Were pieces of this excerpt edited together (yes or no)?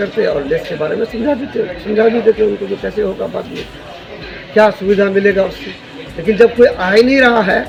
no